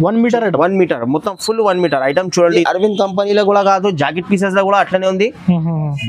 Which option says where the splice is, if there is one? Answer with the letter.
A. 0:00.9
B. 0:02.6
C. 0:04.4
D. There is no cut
B